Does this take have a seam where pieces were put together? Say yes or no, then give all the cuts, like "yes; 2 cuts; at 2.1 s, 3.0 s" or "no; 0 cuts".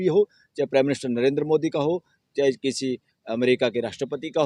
no; 0 cuts